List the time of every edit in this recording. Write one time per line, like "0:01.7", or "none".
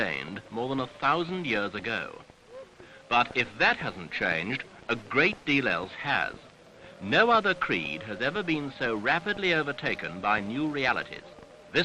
0:05.9